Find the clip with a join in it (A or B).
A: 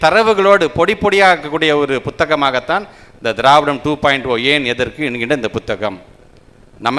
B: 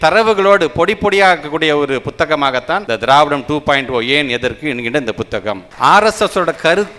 B